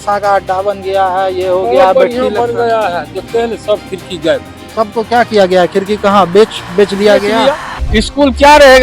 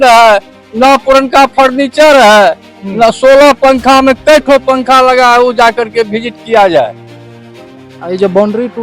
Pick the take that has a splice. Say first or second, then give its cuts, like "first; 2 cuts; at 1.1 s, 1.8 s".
first; 2 cuts; at 4.6 s, 7.7 s